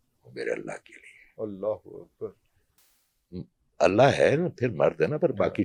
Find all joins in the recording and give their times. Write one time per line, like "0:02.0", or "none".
none